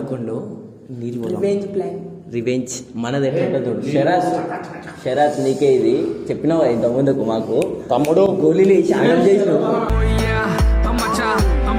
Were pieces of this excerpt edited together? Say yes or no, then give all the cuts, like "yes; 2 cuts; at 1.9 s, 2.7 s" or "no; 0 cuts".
no; 0 cuts